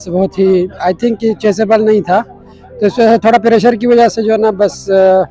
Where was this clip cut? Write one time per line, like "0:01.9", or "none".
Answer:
none